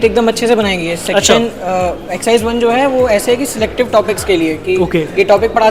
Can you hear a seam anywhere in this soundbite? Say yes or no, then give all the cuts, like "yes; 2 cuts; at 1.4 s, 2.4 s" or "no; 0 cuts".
no; 0 cuts